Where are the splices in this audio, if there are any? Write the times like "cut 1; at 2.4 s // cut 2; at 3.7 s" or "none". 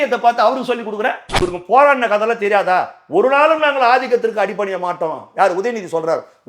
cut 1; at 1.3 s